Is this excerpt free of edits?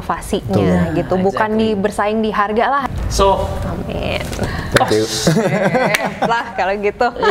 no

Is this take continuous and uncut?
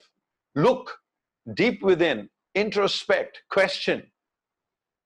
yes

